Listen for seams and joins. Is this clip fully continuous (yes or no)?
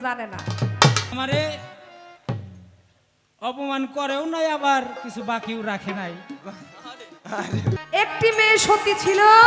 no